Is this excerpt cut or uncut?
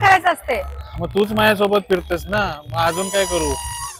uncut